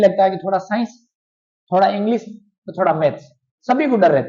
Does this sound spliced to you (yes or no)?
no